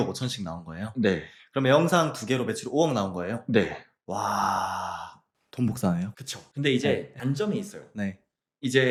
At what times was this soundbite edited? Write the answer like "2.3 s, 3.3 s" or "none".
none

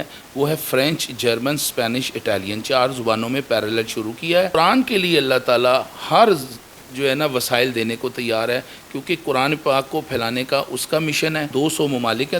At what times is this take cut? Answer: 4.6 s, 11.5 s

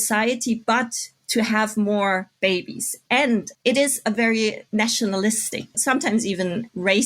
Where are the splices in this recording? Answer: 3.5 s, 4.6 s, 5.7 s

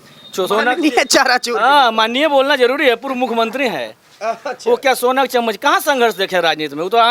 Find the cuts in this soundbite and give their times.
none

